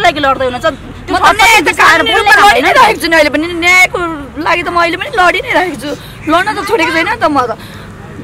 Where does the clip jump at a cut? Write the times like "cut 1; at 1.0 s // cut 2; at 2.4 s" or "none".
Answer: none